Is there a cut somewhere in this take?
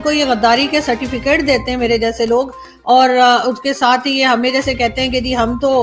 no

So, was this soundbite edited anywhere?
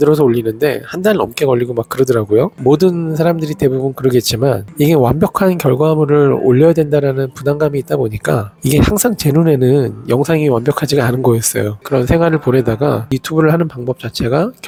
no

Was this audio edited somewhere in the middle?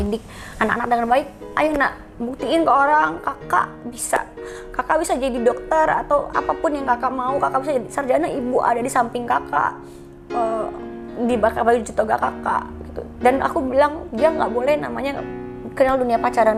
no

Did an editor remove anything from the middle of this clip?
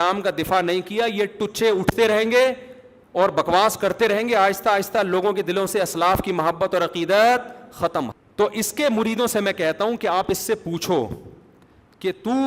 yes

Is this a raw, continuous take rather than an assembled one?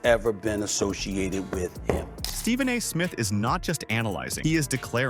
yes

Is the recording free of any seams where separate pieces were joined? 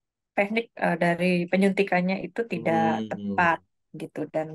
yes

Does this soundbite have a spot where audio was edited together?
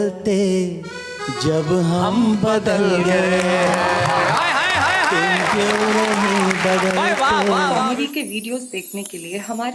yes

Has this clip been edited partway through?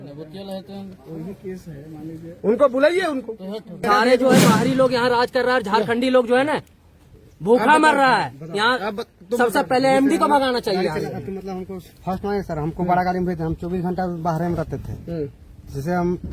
yes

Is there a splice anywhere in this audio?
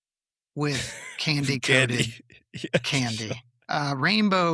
no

